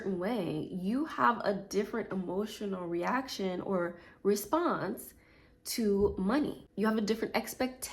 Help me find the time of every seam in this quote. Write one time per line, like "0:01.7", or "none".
0:06.6

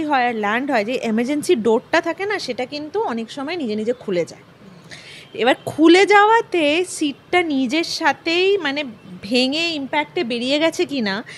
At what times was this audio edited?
none

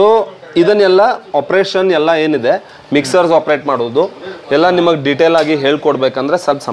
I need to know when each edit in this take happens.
none

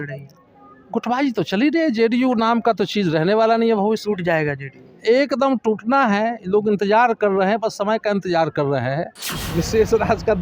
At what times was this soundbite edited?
0:09.4

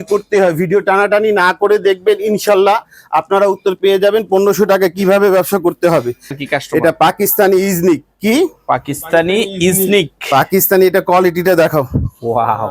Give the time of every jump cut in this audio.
0:06.4

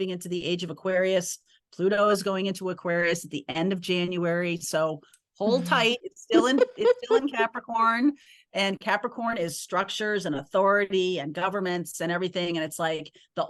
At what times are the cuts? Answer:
none

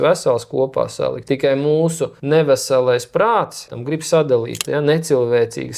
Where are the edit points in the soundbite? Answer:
0:01.2
0:02.1
0:03.8
0:04.6

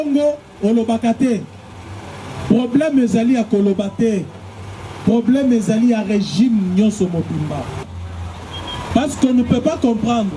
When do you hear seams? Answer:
0:07.9

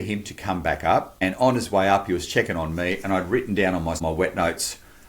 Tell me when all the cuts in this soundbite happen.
0:01.1
0:04.0

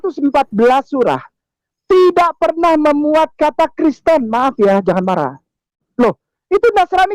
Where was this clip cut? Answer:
0:05.8

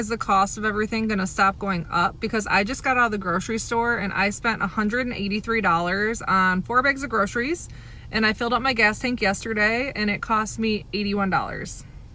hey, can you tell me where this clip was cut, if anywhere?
none

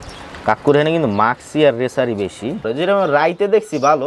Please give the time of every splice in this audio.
0:02.7

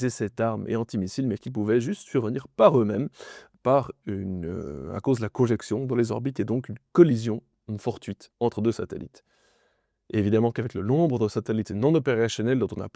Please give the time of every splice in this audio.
none

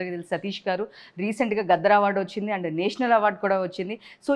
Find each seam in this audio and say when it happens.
none

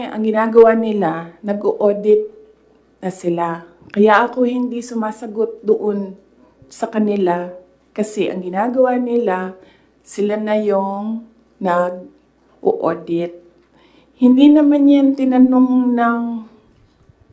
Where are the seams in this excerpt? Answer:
none

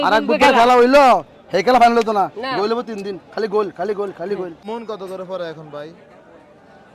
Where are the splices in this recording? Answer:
0:04.6

